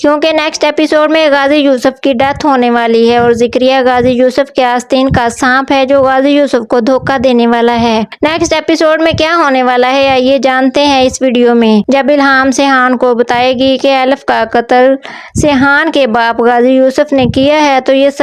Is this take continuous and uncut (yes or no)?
no